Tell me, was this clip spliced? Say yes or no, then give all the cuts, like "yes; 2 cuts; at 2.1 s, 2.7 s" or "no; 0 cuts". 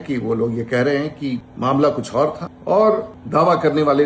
yes; 3 cuts; at 1.5 s, 2.5 s, 3.2 s